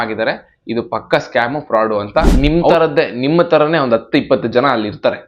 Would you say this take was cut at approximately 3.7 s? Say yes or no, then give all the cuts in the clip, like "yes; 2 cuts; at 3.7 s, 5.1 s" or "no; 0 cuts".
no; 1 cut; at 2.3 s